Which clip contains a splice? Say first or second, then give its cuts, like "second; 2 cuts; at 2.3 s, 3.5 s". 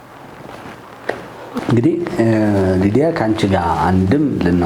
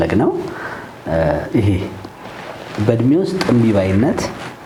first; 1 cut; at 1.6 s